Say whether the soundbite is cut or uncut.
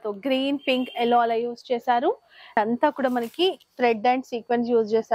cut